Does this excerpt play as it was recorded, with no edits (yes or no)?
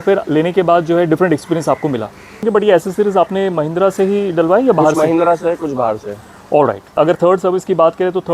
no